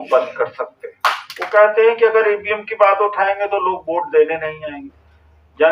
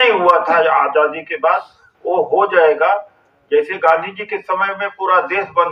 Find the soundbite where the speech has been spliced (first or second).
first